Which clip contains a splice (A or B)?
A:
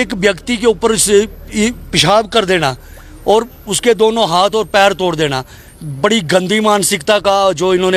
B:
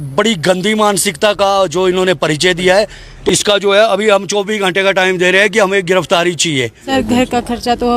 B